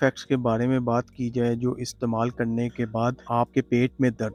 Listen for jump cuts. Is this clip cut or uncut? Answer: uncut